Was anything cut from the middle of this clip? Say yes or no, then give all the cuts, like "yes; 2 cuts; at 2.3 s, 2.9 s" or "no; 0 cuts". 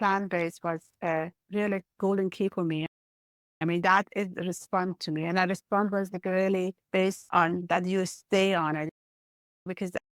yes; 1 cut; at 1.0 s